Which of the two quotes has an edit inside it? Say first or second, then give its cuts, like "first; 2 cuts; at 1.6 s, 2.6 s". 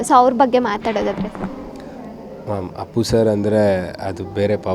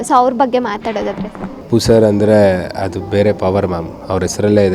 second; 1 cut; at 1.6 s